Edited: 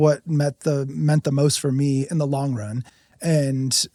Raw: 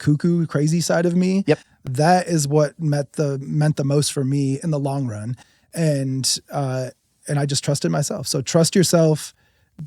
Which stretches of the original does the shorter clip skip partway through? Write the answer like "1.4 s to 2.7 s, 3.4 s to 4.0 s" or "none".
none